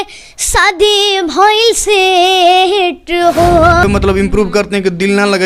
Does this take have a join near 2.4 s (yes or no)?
no